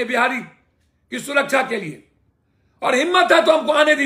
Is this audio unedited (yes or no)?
yes